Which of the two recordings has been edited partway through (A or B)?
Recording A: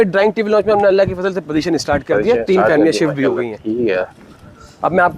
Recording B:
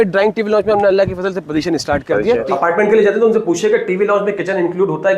B